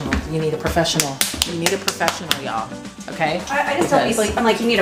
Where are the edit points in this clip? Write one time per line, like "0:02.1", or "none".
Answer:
none